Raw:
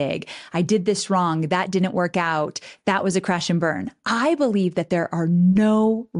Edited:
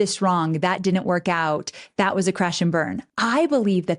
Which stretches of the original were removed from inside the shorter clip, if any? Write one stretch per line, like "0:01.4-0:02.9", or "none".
none